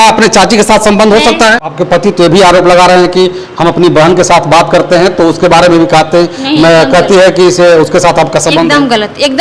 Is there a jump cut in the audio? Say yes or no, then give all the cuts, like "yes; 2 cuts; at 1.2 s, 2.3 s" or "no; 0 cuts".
yes; 1 cut; at 1.6 s